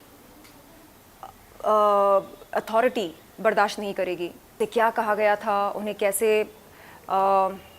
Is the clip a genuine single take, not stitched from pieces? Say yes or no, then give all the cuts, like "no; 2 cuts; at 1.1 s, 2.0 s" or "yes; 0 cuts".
no; 1 cut; at 4.5 s